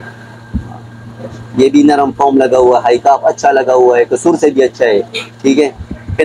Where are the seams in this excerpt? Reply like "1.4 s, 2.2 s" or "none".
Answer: none